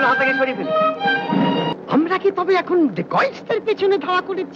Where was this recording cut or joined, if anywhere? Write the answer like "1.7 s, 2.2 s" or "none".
1.7 s